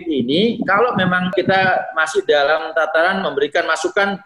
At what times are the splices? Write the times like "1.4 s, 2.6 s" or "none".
1.3 s